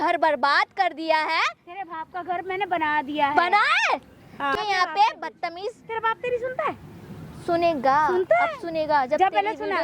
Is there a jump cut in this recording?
no; 0 cuts

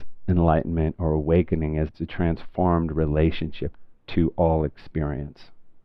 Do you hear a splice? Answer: yes; 2 cuts; at 1.9 s, 3.7 s

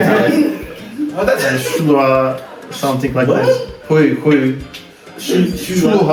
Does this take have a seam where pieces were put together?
no; 0 cuts

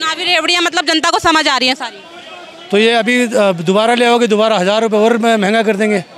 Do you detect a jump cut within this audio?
no; 0 cuts

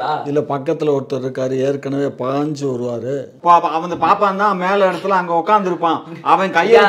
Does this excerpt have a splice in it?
yes; 1 cut; at 3.3 s

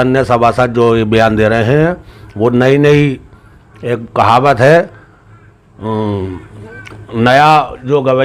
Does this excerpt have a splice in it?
no; 0 cuts

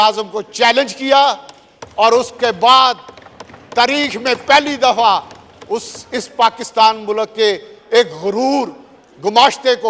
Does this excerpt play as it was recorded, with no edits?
yes; 0 cuts

